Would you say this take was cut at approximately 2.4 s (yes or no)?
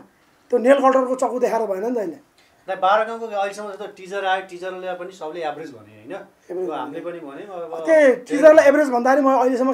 no